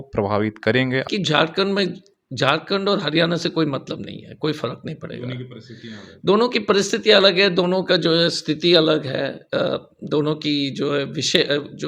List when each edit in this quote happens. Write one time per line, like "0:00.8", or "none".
0:01.1